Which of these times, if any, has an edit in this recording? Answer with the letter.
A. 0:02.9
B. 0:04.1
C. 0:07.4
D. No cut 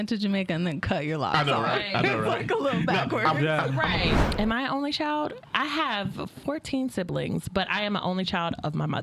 B